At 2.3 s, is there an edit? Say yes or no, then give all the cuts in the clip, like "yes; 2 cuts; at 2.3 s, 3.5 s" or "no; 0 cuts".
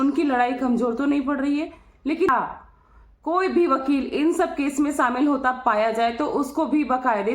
yes; 1 cut; at 2.3 s